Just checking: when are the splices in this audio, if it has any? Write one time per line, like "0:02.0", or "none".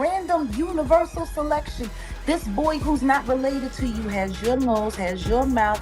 none